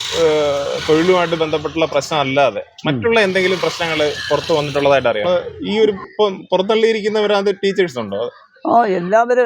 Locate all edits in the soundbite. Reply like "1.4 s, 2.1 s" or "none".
5.2 s